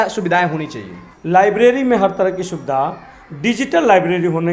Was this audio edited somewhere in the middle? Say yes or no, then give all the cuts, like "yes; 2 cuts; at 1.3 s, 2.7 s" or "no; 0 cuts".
yes; 1 cut; at 1.1 s